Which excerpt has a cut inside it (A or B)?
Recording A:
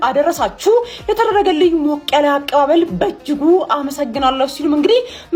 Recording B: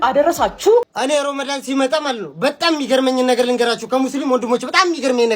B